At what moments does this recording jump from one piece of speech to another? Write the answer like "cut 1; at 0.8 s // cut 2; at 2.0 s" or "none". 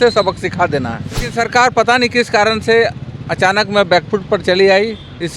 cut 1; at 1.3 s